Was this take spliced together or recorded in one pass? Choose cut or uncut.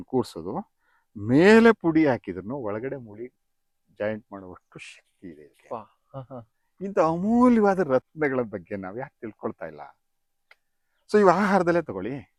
uncut